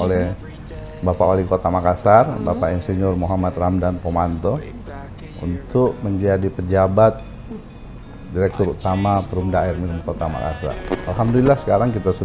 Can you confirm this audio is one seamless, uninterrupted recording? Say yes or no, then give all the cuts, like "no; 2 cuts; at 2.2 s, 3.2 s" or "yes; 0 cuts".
no; 1 cut; at 11.0 s